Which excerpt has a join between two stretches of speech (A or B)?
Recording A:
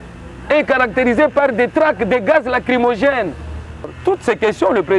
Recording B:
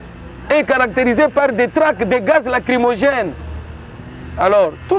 A